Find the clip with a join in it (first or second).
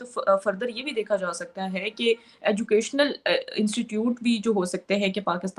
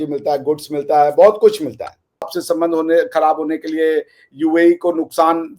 second